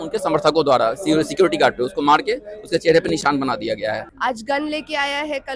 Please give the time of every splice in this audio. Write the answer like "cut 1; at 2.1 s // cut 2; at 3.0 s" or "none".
cut 1; at 4.1 s